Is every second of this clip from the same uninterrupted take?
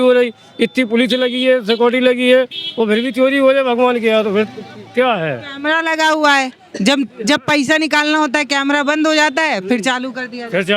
yes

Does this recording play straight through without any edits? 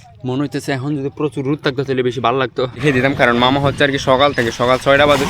no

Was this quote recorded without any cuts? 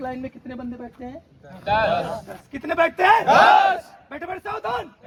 yes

